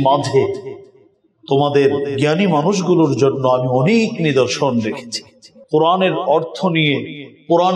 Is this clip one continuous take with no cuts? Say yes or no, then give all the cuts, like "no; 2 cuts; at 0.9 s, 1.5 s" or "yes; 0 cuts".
no; 1 cut; at 5.5 s